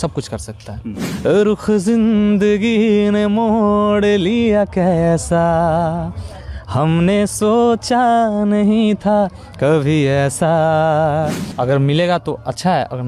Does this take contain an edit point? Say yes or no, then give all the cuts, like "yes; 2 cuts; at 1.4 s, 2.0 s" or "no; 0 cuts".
yes; 2 cuts; at 1.0 s, 11.4 s